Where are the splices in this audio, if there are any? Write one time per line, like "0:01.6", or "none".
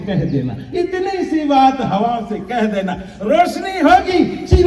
none